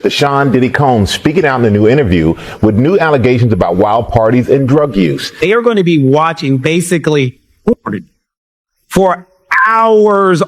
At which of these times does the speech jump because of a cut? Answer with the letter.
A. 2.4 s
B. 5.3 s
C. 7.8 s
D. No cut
B